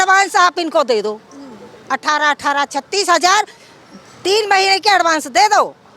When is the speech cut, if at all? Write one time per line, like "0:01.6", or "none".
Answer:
none